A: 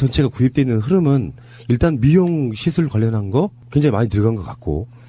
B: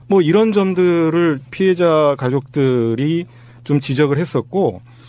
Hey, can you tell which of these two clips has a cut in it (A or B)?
A